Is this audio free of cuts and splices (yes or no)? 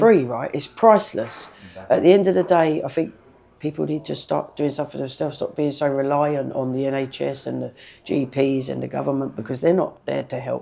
yes